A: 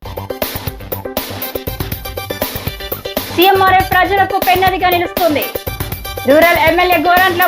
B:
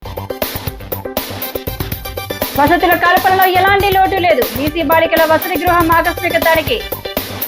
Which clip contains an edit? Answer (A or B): A